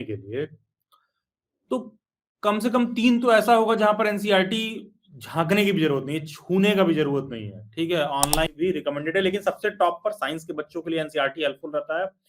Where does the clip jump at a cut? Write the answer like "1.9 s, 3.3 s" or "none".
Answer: 8.5 s